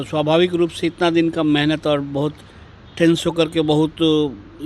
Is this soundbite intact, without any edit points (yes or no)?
yes